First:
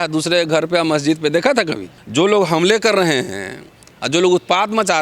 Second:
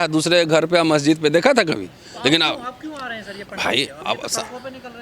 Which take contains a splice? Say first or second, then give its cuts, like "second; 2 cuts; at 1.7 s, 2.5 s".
first; 1 cut; at 2.0 s